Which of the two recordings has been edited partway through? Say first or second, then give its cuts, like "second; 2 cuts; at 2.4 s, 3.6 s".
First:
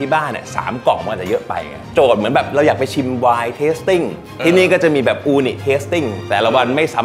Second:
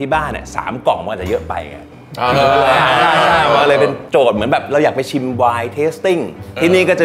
first; 2 cuts; at 1.8 s, 6.2 s